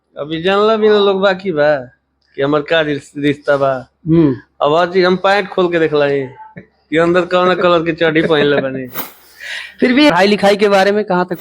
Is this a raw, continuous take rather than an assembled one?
no; 1 cut; at 10.1 s

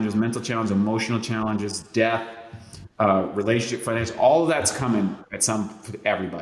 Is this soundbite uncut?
yes; 0 cuts

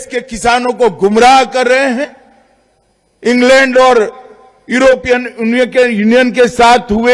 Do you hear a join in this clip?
no; 0 cuts

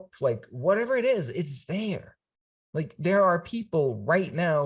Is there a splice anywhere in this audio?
no; 0 cuts

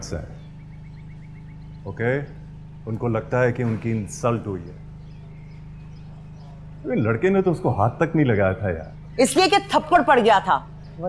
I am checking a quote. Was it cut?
no; 0 cuts

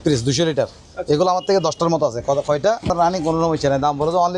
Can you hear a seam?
yes; 1 cut; at 2.9 s

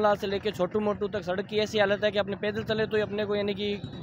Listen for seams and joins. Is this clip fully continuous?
yes; 0 cuts

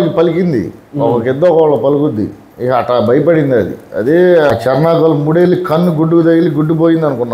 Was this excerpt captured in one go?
no; 1 cut; at 4.5 s

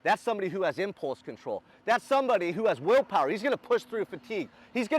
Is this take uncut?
yes; 0 cuts

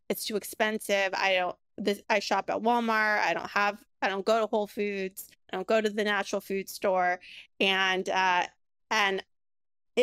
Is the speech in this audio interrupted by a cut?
no; 0 cuts

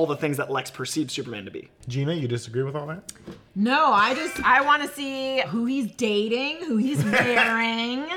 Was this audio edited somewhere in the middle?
yes; 2 cuts; at 1.8 s, 5.5 s

